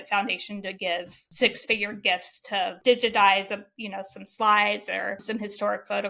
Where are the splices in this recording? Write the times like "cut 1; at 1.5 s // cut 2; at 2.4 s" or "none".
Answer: cut 1; at 5.2 s